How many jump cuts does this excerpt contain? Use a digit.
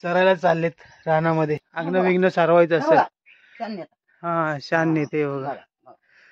1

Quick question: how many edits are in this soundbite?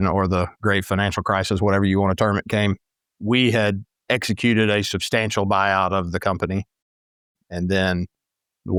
0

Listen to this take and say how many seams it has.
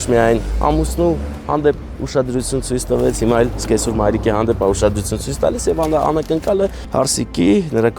1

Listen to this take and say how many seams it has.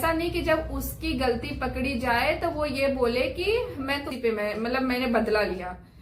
1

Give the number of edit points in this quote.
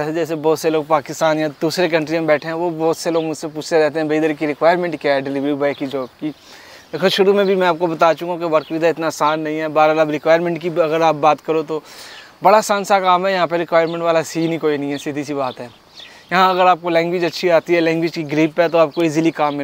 0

